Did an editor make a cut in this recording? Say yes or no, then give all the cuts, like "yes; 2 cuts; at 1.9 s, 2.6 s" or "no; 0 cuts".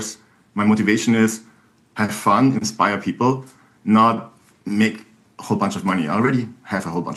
no; 0 cuts